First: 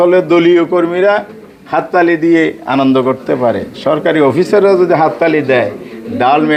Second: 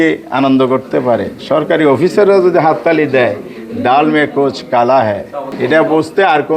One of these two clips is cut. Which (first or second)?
second